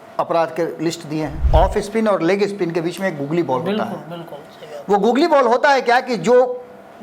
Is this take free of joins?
no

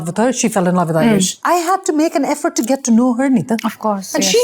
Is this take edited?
no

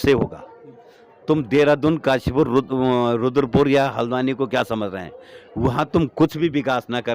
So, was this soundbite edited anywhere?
no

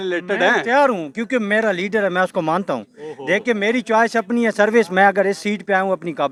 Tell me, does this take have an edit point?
no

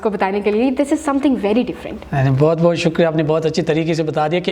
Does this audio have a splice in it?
no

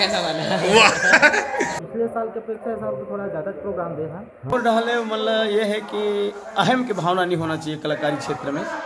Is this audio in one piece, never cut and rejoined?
no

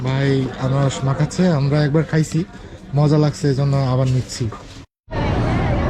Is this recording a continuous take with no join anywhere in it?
no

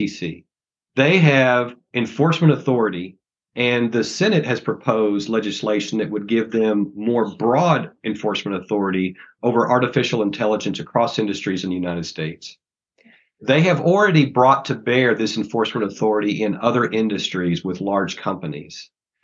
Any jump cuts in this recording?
yes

